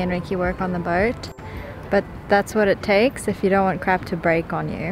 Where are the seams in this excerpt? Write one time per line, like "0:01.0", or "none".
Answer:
none